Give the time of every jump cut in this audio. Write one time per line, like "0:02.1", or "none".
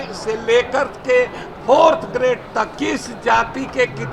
0:02.7